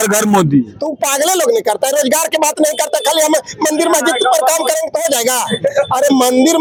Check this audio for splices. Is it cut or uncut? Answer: uncut